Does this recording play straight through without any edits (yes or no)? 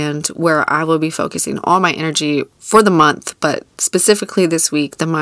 yes